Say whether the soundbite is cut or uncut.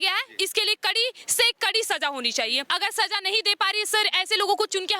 cut